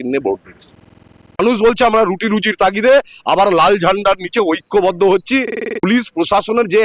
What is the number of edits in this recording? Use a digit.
2